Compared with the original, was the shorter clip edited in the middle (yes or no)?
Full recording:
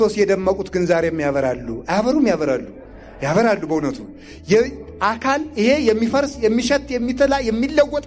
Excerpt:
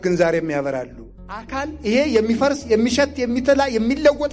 yes